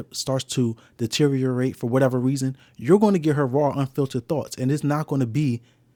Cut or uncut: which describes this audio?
uncut